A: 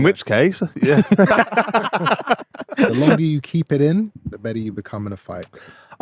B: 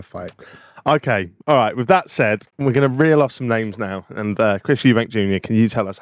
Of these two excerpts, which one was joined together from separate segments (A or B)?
A